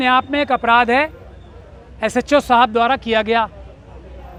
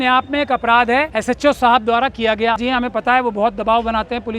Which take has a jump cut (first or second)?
second